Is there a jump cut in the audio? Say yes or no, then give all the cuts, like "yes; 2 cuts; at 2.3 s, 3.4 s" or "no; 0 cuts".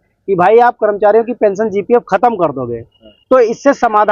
no; 0 cuts